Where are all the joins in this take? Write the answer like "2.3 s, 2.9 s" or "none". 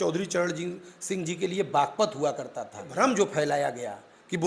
2.9 s